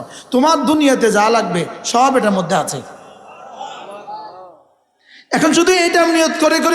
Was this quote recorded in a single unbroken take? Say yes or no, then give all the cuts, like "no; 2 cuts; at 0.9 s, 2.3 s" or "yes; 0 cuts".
yes; 0 cuts